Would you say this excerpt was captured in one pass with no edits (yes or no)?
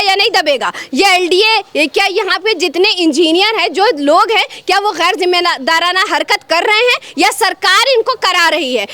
yes